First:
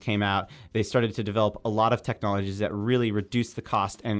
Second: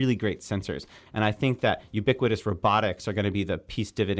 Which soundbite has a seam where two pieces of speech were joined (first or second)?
second